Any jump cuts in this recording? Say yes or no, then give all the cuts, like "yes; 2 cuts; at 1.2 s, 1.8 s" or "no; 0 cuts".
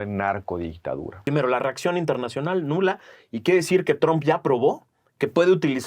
yes; 1 cut; at 1.3 s